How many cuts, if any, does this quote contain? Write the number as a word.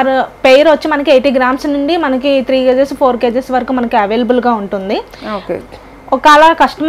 zero